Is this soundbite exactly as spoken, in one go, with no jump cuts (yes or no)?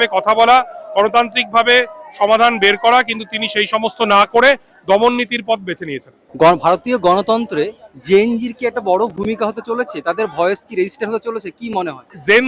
yes